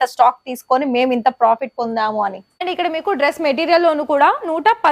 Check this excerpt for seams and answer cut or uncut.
cut